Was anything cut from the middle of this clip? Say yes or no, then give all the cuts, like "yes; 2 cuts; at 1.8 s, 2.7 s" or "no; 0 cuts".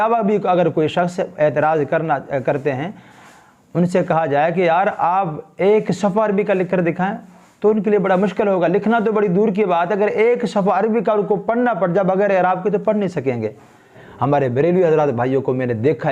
yes; 1 cut; at 14.0 s